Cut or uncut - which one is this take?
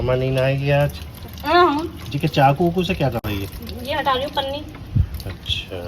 uncut